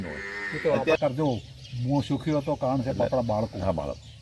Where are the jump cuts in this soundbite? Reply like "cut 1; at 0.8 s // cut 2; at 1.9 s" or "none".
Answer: cut 1; at 1.0 s

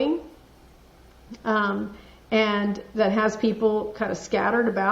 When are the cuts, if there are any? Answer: none

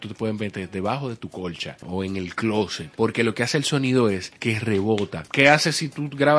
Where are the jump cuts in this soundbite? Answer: cut 1; at 1.8 s // cut 2; at 2.8 s // cut 3; at 4.3 s // cut 4; at 5.2 s

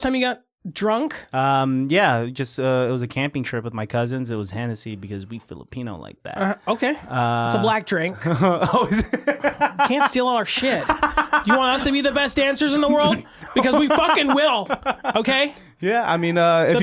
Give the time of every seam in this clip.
cut 1; at 1.2 s

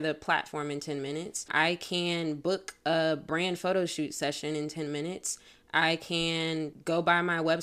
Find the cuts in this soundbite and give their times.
cut 1; at 1.5 s // cut 2; at 6.8 s

